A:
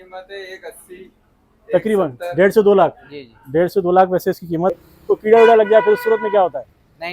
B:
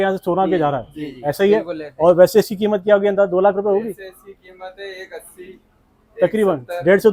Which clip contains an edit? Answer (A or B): A